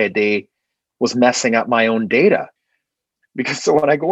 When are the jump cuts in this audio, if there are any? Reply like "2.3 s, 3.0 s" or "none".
2.6 s